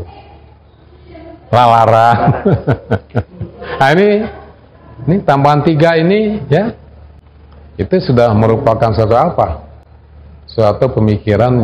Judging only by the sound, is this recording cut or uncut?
uncut